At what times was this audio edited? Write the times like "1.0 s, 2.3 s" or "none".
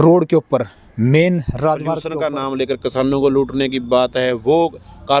2.1 s